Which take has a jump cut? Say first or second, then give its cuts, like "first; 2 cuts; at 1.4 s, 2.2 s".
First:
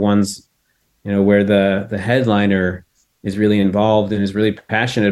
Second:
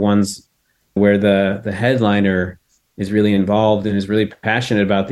second; 1 cut; at 1.0 s